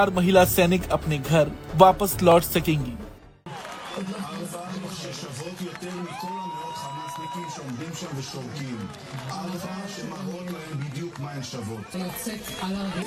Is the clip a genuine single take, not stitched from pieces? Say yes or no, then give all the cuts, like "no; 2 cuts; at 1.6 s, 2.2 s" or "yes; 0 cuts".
yes; 0 cuts